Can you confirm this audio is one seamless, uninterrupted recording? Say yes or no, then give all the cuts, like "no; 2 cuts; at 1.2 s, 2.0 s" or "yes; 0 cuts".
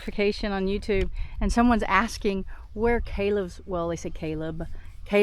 yes; 0 cuts